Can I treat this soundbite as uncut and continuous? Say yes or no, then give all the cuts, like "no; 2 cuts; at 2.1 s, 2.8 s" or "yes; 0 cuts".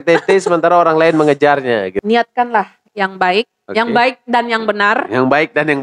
no; 1 cut; at 1.9 s